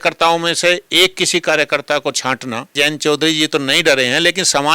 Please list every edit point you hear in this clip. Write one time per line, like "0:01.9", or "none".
0:02.7